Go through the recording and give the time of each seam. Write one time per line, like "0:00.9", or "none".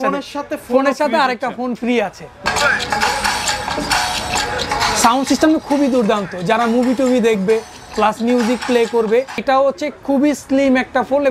0:02.4
0:09.4